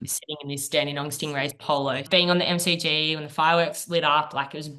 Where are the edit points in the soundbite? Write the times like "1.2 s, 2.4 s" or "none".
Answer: 2.1 s